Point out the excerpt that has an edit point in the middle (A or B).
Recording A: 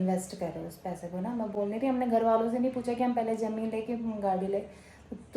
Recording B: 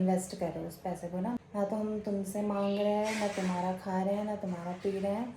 B